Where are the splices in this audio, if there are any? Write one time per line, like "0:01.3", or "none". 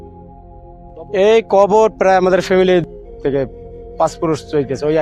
none